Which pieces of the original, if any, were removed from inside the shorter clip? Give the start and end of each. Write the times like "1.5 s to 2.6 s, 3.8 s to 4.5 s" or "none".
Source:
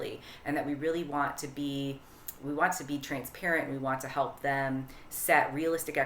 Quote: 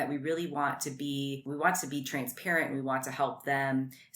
2.0 s to 2.4 s